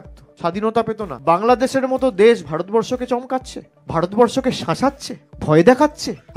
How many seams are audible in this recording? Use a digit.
1